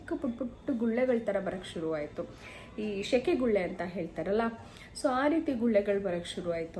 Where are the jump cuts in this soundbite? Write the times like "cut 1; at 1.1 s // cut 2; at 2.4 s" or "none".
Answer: none